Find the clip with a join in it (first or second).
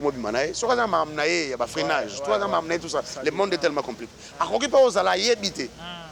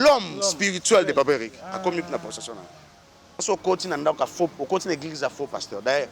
second